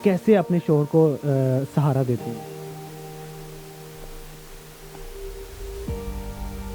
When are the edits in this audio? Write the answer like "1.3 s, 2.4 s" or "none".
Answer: 2.3 s

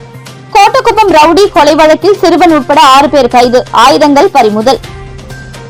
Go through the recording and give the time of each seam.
none

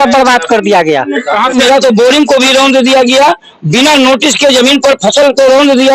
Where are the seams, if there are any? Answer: 1.5 s

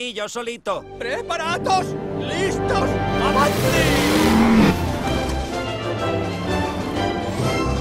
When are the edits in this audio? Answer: 4.1 s

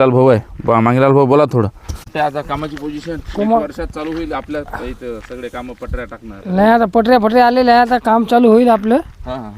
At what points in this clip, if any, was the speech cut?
2.1 s

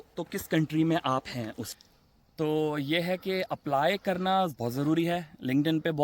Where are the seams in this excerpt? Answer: 1.7 s

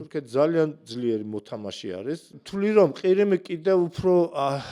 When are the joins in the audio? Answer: 2.4 s

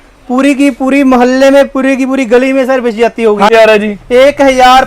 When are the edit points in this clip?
3.5 s

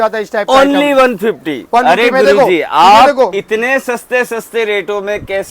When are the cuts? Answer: none

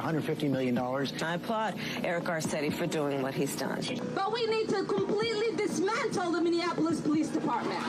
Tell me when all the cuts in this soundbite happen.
none

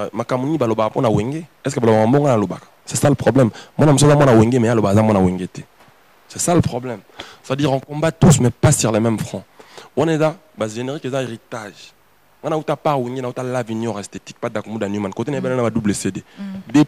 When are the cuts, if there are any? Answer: none

